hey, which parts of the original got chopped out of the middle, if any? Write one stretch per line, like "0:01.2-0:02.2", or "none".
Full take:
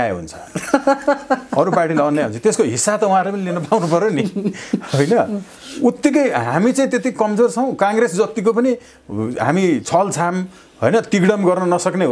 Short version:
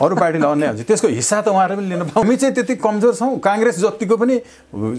0:03.8-0:06.6